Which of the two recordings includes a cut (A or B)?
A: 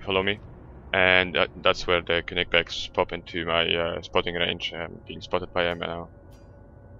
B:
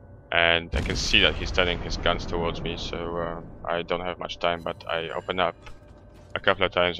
A